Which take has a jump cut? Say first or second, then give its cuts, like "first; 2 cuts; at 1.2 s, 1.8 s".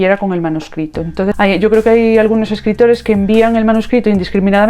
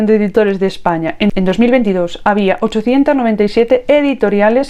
first; 1 cut; at 1.3 s